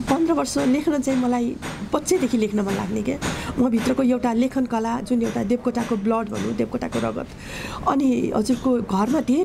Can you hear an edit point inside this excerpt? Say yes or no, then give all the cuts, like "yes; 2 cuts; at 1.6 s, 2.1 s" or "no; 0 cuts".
no; 0 cuts